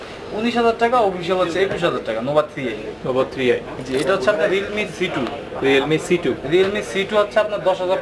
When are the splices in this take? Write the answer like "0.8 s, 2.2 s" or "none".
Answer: none